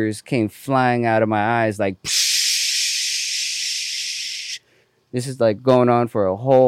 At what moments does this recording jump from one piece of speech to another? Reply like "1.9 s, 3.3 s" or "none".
none